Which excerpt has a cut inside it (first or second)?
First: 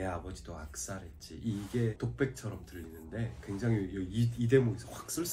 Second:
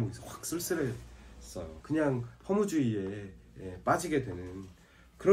second